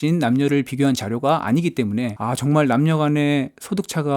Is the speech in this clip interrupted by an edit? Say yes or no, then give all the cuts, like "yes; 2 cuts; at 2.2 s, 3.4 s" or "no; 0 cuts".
yes; 1 cut; at 2.2 s